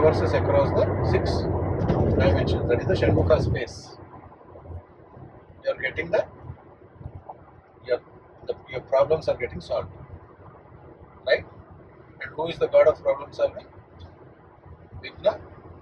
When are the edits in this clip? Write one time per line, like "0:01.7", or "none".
none